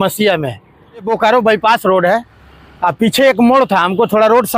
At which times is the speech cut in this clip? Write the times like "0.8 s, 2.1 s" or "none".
1.1 s

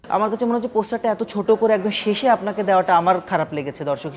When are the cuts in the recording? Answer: none

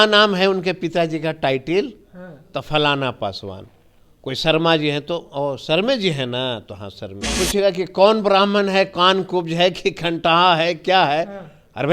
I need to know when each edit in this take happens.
7.3 s

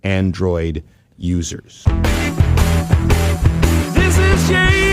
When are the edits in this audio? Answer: 1.9 s

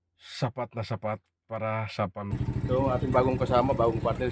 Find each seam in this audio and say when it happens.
2.3 s

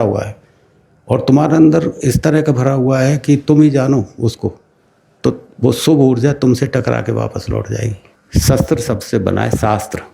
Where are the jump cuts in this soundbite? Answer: 8.0 s

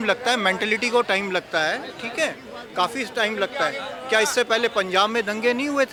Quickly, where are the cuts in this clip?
none

